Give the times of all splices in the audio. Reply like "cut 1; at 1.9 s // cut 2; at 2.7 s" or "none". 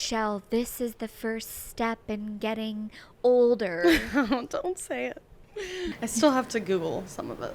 cut 1; at 5.9 s

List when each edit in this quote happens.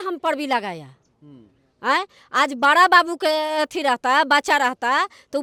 none

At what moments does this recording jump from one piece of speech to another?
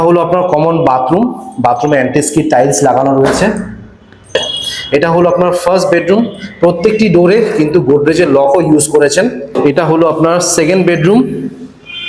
cut 1; at 4.3 s // cut 2; at 9.5 s

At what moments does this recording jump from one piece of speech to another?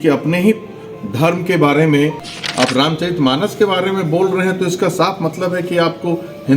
cut 1; at 2.2 s

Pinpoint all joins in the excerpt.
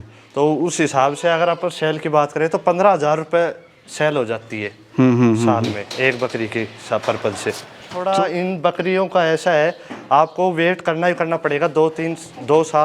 cut 1; at 8.0 s

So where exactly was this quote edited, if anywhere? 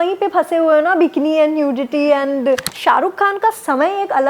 cut 1; at 2.7 s

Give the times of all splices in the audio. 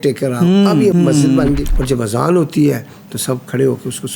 cut 1; at 0.9 s // cut 2; at 1.7 s

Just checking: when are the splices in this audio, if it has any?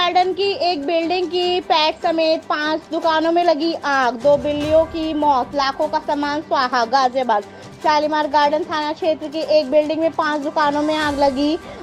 none

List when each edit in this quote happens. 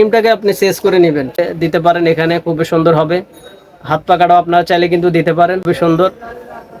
cut 1; at 1.4 s // cut 2; at 5.6 s

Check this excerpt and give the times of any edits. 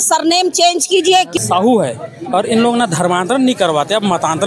cut 1; at 1.4 s

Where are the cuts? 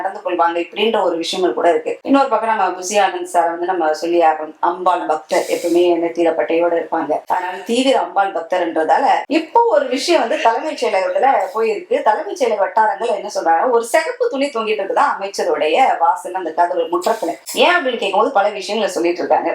none

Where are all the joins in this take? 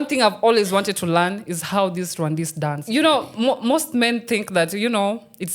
cut 1; at 2.8 s

